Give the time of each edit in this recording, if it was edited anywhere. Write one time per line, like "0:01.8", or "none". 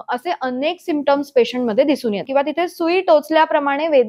0:02.2